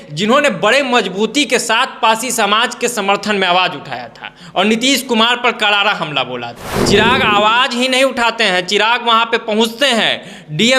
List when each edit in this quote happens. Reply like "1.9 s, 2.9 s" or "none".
6.7 s